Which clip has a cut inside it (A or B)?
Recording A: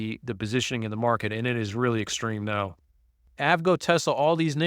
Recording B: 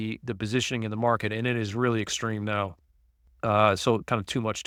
A